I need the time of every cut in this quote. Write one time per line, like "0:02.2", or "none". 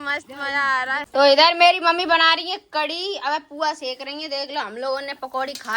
0:01.1